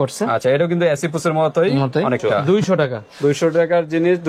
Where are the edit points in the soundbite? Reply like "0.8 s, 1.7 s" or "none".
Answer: 2.3 s